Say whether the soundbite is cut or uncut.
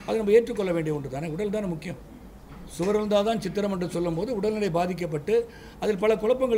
uncut